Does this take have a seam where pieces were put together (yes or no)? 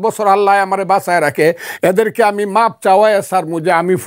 no